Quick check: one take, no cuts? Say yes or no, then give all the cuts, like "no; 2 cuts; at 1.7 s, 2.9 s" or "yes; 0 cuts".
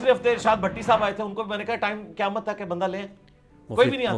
yes; 0 cuts